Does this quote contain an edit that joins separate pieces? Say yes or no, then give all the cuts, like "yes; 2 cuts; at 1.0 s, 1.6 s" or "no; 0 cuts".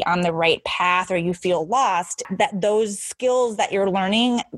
yes; 1 cut; at 2.3 s